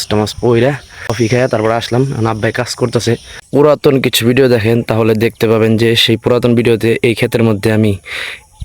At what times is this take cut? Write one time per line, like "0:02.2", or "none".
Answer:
0:01.1
0:03.4